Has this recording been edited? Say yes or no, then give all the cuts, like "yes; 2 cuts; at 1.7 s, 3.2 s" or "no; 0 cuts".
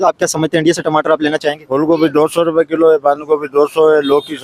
yes; 1 cut; at 1.6 s